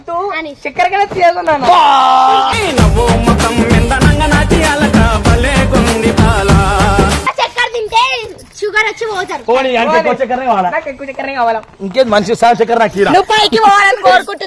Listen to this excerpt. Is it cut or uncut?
uncut